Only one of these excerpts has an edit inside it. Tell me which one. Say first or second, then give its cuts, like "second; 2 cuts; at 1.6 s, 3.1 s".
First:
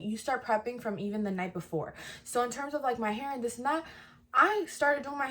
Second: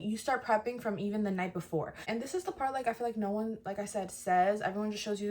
second; 1 cut; at 2.1 s